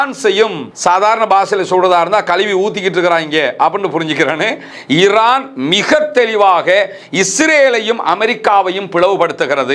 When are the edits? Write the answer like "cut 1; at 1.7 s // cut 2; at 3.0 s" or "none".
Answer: cut 1; at 4.7 s